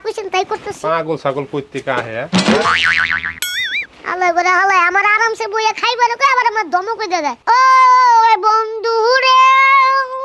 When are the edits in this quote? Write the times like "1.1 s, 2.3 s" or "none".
7.4 s